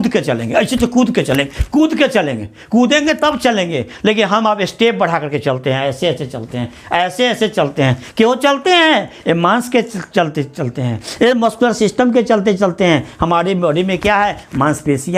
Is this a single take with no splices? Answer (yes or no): yes